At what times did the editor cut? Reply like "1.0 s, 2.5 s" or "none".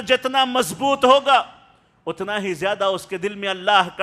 none